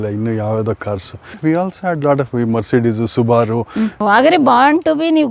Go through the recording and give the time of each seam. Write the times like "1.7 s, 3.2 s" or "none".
1.3 s, 4.0 s